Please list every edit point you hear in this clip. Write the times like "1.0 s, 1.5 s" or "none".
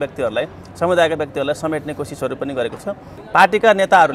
3.1 s